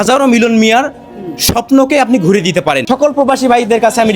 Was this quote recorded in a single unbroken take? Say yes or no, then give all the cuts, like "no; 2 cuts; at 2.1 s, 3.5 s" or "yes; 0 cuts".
no; 1 cut; at 2.8 s